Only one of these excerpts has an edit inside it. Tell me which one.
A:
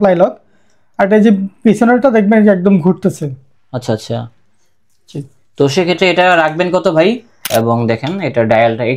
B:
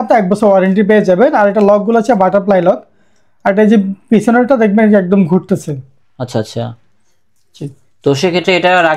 A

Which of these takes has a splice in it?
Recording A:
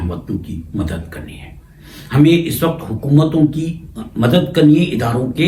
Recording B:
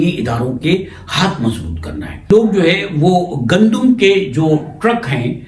B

